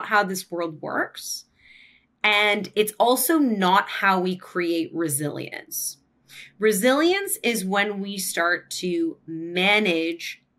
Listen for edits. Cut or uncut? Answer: uncut